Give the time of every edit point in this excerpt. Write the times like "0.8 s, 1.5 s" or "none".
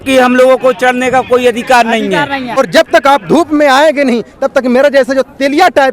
2.6 s